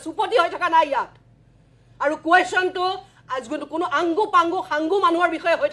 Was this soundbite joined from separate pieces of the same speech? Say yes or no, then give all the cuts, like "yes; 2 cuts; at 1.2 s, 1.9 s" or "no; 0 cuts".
no; 0 cuts